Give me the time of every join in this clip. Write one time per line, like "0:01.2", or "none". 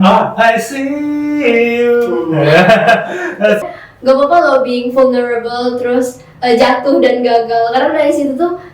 0:03.7